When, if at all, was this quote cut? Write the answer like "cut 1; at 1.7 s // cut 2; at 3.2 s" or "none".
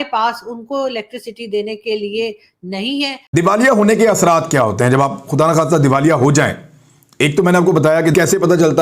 cut 1; at 3.2 s